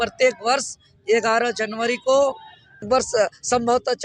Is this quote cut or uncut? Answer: cut